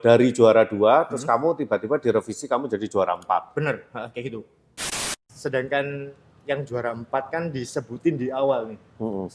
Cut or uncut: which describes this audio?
cut